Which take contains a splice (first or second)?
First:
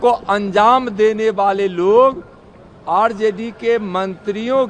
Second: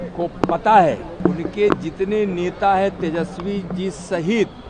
second